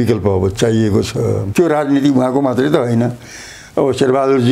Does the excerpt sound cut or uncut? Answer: cut